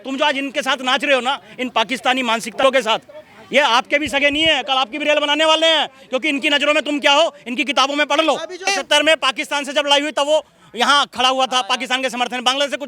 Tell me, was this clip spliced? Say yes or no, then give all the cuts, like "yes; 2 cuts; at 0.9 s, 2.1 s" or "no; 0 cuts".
yes; 1 cut; at 8.7 s